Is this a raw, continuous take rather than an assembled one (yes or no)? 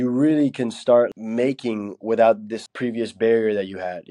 no